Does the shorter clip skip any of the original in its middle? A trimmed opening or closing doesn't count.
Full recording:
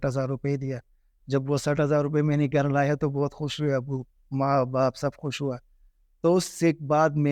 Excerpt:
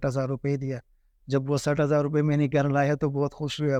no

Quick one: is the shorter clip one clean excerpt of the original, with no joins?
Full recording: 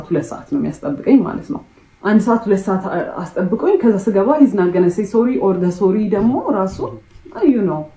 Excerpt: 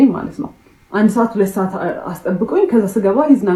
yes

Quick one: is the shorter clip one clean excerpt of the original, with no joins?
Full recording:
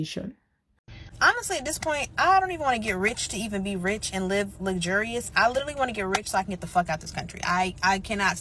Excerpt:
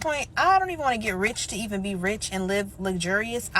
yes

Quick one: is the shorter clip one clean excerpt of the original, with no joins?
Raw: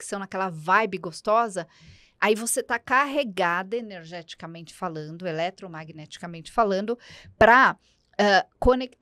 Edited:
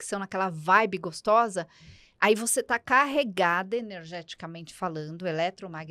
yes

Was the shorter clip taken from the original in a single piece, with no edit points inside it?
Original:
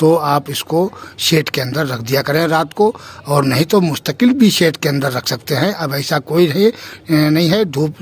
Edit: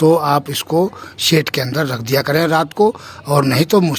yes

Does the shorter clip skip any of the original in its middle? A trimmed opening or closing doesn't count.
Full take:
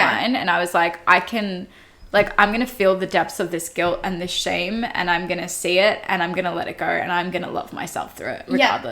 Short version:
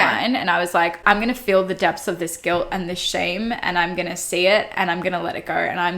yes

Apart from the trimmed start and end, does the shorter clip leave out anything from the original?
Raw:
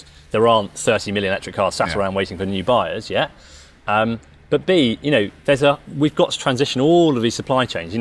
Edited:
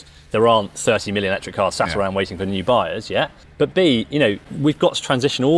yes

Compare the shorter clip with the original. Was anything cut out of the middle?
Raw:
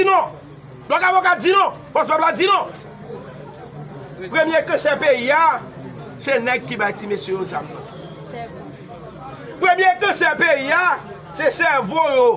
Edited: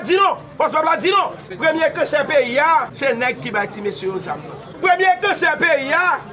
yes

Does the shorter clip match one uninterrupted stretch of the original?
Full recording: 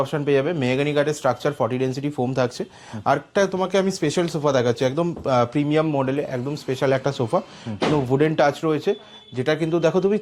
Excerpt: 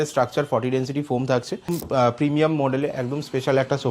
no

